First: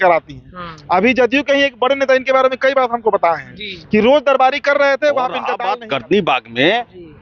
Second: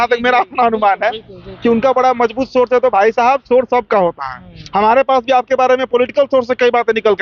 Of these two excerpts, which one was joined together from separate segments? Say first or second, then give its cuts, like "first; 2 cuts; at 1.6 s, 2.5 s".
first; 1 cut; at 5.5 s